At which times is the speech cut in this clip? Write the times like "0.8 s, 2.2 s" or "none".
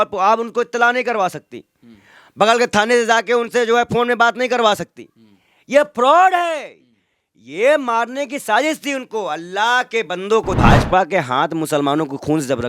10.6 s